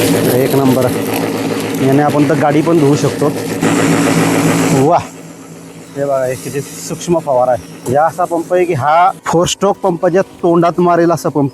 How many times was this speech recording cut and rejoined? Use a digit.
3